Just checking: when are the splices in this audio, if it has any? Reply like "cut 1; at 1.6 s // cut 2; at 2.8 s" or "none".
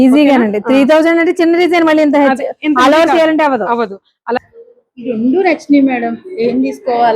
cut 1; at 4.4 s